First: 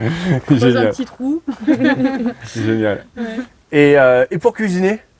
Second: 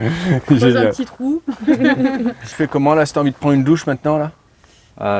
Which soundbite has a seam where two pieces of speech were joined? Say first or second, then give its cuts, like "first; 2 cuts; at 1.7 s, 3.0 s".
second; 1 cut; at 2.5 s